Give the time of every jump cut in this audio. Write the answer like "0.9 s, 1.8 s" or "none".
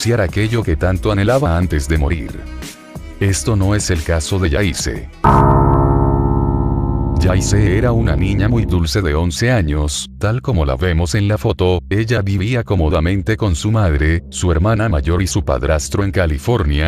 12.6 s